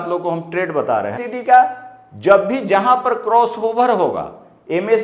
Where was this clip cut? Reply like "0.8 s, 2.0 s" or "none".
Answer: 1.3 s